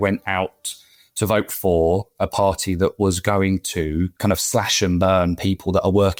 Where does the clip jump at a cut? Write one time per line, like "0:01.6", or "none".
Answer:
none